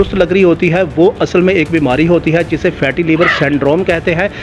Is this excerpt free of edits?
yes; 0 cuts

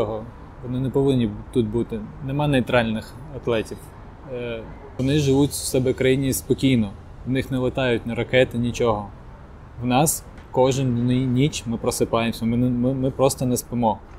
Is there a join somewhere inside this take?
yes; 1 cut; at 5.0 s

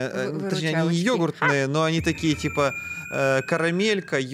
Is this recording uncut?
yes; 0 cuts

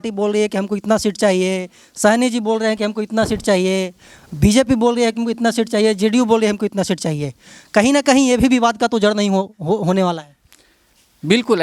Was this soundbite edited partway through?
no; 0 cuts

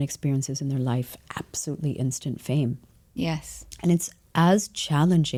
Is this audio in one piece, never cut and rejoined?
yes; 0 cuts

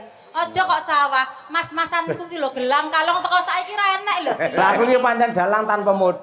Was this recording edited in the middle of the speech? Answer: yes; 1 cut; at 4.6 s

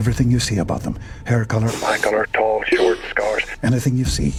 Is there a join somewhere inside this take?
no; 0 cuts

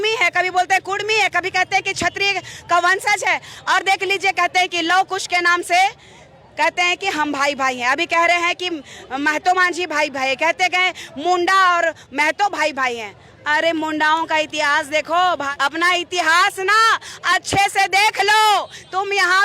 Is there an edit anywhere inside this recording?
yes; 2 cuts; at 3.5 s, 15.5 s

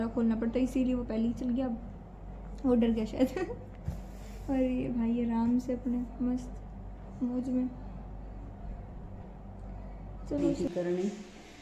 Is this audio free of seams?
no; 1 cut; at 10.5 s

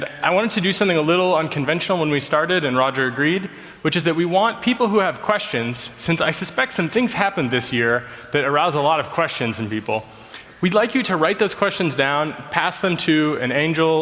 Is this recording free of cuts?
no; 1 cut; at 7.1 s

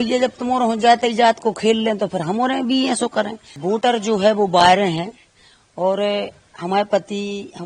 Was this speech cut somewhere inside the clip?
yes; 1 cut; at 3.5 s

